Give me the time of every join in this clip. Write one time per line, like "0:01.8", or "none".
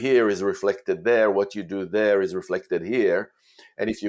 none